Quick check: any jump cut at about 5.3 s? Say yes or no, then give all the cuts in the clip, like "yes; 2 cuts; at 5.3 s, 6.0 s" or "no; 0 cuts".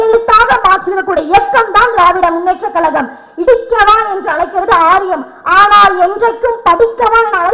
no; 0 cuts